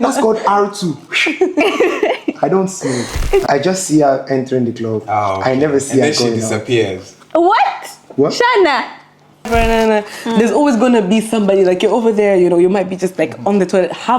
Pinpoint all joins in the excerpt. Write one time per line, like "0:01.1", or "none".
0:03.4
0:09.5